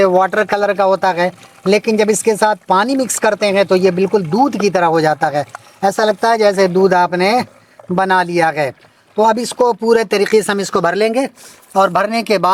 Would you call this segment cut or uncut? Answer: uncut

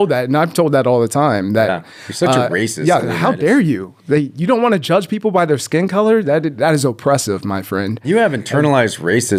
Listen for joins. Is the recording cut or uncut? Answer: uncut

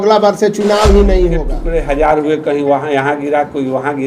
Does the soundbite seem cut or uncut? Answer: cut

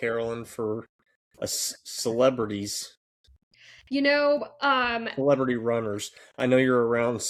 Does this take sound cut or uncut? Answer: uncut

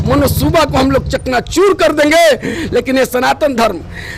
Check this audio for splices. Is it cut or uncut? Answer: uncut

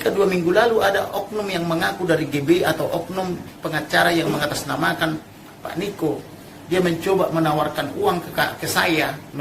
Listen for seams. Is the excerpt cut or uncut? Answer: uncut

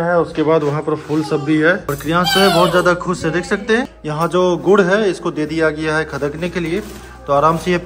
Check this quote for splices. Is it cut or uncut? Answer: cut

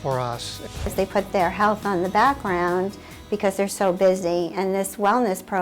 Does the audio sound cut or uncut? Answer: cut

